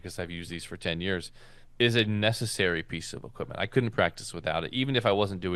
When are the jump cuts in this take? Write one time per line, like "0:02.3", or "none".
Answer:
none